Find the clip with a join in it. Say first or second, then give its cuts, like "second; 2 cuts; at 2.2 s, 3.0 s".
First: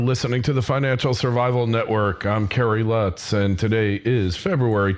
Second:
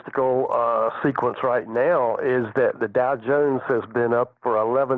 first; 1 cut; at 1.3 s